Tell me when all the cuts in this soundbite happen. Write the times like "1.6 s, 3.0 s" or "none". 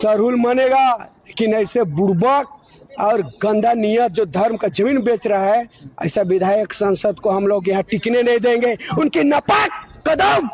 none